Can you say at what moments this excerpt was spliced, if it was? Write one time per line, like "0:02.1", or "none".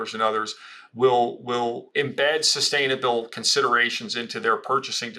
0:01.8